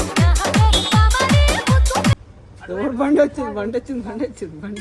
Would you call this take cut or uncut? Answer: cut